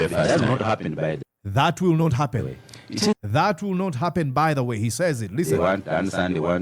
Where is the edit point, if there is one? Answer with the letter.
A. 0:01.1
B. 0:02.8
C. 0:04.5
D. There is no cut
A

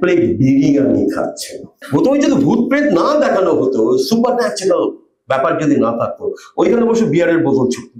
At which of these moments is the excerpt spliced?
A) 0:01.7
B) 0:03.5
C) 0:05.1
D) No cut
A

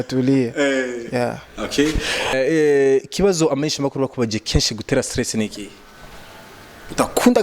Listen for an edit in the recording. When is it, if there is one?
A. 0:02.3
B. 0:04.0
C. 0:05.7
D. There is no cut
A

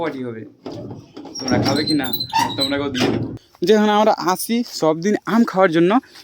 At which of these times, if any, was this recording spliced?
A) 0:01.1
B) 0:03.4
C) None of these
B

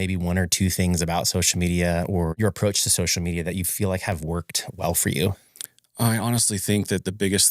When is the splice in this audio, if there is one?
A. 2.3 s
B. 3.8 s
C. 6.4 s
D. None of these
A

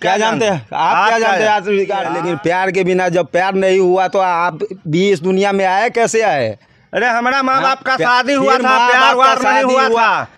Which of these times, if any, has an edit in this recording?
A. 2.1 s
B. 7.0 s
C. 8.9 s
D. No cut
A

